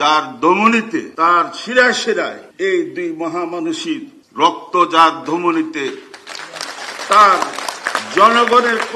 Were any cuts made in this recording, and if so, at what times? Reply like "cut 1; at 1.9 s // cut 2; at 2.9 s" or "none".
cut 1; at 1.1 s // cut 2; at 2.4 s // cut 3; at 4.2 s